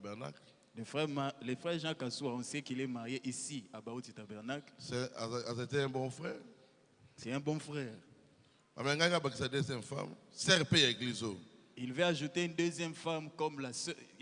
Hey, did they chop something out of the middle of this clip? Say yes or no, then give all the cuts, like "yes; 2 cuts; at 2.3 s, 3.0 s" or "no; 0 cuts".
no; 0 cuts